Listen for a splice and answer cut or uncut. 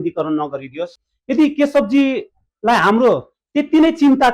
cut